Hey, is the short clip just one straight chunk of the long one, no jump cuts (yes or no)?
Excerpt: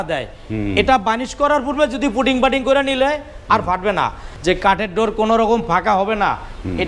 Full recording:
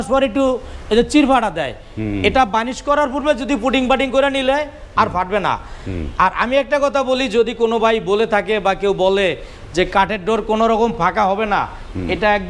no